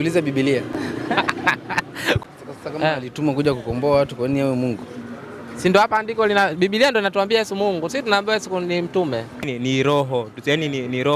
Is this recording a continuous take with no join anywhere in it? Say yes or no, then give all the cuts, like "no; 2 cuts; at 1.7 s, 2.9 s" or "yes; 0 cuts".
no; 2 cuts; at 2.2 s, 9.4 s